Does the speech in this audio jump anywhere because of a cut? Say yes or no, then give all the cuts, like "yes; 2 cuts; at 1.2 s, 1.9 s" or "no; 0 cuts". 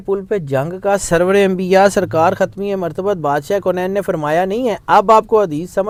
no; 0 cuts